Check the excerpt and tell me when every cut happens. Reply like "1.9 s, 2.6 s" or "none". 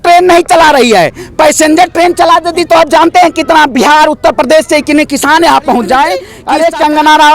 6.3 s